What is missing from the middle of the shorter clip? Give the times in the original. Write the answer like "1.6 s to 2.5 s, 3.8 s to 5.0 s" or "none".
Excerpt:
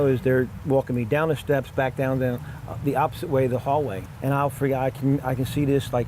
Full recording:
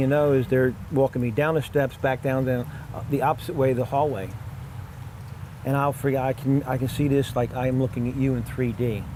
4.3 s to 5.5 s